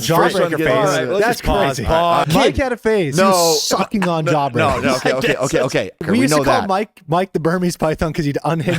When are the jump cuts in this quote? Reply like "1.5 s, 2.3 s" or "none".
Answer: 2.3 s, 6.0 s